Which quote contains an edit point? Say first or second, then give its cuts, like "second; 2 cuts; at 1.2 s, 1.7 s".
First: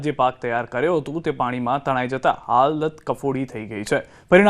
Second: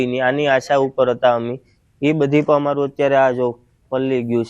second; 1 cut; at 1.1 s